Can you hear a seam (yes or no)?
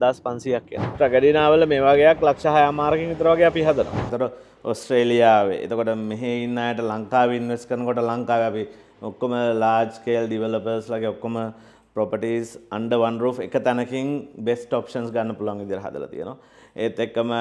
yes